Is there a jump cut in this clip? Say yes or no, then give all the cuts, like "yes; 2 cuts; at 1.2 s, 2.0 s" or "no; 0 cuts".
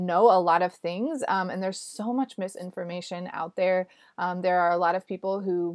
no; 0 cuts